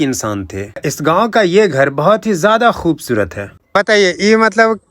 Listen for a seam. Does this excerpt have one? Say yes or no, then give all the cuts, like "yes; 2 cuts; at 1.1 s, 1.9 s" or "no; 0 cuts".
yes; 2 cuts; at 0.9 s, 3.5 s